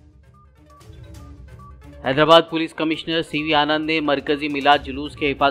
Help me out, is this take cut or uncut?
cut